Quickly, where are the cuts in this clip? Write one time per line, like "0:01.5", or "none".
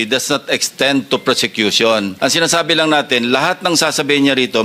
0:02.1